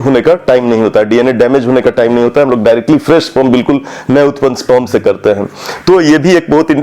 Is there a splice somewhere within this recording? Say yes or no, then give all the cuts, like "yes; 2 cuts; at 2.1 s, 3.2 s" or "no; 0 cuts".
no; 0 cuts